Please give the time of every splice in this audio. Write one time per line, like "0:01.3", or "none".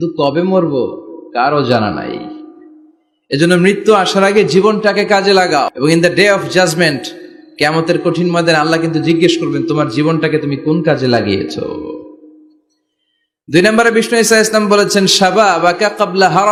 none